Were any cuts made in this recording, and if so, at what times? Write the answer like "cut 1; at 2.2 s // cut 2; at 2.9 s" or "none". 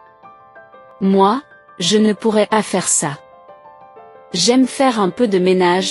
cut 1; at 0.9 s